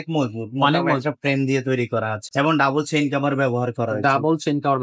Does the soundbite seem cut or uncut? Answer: cut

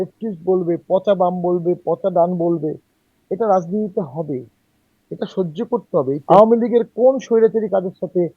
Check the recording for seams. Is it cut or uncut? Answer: cut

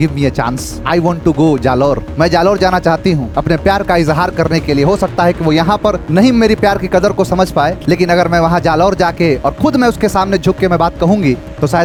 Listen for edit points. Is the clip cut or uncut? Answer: uncut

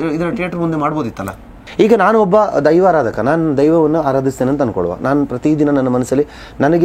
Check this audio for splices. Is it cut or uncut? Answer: cut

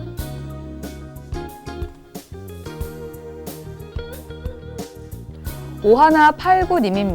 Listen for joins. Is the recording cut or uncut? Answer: cut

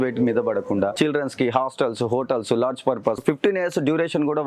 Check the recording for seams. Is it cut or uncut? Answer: cut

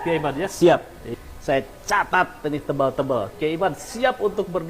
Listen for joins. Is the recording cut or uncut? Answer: cut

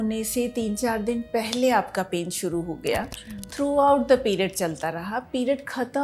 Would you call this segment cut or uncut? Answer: uncut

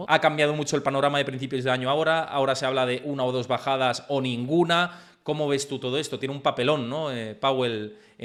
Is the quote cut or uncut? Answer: uncut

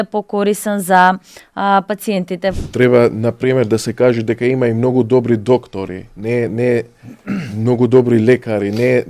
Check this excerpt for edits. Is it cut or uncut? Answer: cut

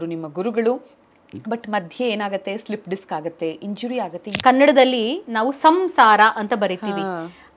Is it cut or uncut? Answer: cut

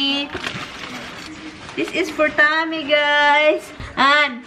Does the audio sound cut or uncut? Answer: uncut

